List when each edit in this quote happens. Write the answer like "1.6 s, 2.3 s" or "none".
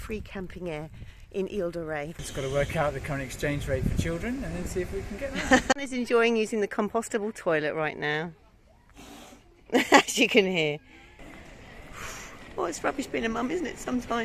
2.2 s, 5.7 s, 11.2 s